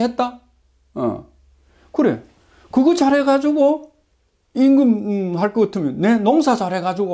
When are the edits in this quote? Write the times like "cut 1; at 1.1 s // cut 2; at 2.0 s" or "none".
none